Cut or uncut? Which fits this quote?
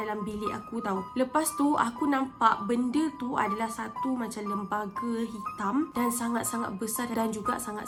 uncut